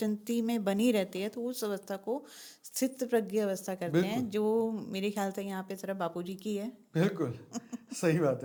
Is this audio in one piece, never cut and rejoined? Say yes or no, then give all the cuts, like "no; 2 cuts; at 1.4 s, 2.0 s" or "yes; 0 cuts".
yes; 0 cuts